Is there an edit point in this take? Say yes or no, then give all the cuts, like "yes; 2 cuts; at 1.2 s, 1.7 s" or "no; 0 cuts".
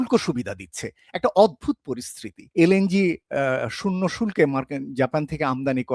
yes; 1 cut; at 2.4 s